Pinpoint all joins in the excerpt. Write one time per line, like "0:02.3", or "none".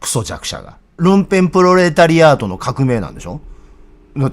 0:01.0